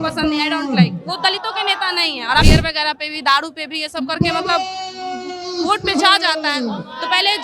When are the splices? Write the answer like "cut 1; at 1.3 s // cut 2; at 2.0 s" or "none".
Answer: cut 1; at 2.4 s